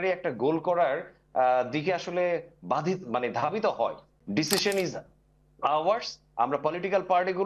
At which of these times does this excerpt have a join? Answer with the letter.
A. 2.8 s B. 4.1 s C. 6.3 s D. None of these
B